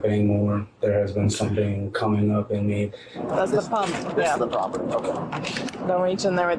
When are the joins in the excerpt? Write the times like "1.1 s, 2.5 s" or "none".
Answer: 2.9 s, 5.8 s